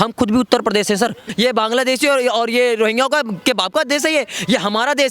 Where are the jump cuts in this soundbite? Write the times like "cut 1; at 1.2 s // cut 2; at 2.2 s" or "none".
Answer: cut 1; at 1.3 s